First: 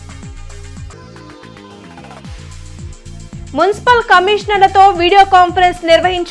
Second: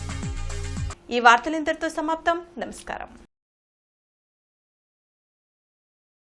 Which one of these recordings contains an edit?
first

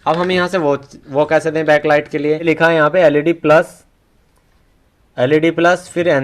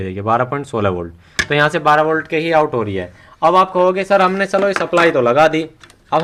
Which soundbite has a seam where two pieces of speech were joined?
first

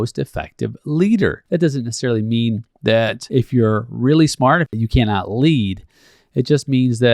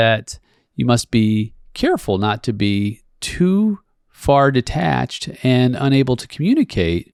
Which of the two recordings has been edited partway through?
first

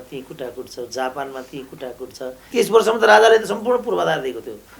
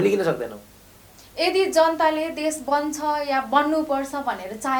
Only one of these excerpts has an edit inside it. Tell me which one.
first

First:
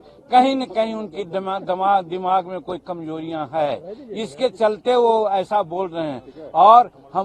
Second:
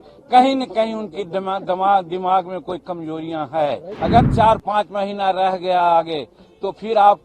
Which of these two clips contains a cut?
second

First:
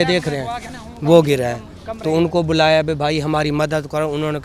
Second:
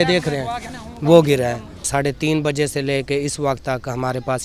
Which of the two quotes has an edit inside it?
second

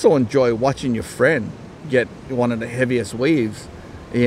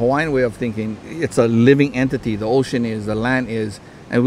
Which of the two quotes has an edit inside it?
second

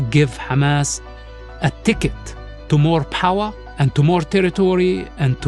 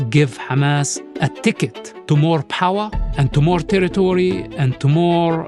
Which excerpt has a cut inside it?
second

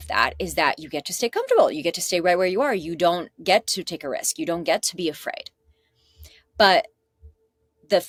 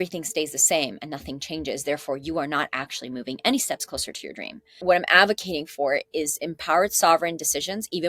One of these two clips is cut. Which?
second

